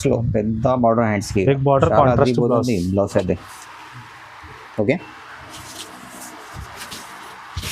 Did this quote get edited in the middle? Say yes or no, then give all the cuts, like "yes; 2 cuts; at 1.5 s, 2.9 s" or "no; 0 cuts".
no; 0 cuts